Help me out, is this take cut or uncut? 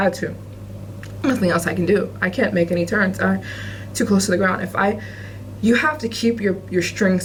uncut